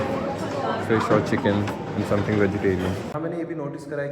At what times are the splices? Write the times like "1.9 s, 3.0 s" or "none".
3.1 s